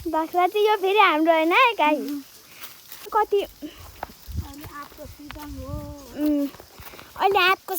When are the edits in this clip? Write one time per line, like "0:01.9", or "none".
0:03.1